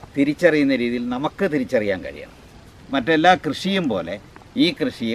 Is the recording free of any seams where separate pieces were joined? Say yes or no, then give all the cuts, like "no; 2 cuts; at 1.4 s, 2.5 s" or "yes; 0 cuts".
no; 1 cut; at 2.8 s